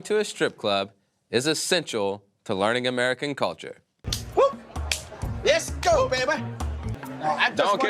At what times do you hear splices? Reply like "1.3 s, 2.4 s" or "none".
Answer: 6.8 s